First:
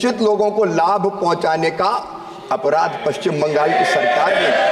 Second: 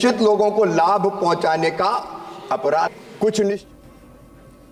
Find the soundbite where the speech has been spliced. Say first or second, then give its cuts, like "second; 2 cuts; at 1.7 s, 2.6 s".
first; 1 cut; at 2.9 s